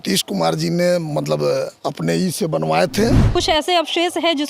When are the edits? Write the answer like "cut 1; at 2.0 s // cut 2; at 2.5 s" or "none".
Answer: cut 1; at 3.2 s